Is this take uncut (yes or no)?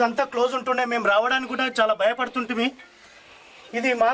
yes